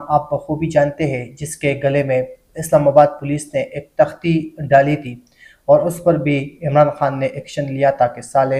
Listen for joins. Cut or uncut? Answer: uncut